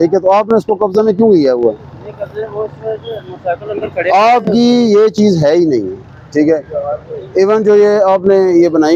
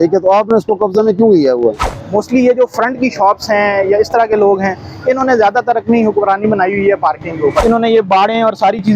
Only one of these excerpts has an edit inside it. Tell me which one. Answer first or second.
second